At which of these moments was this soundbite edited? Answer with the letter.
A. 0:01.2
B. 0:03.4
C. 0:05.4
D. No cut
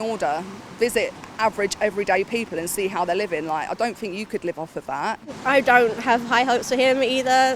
C